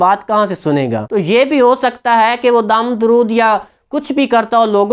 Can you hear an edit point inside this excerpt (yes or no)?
yes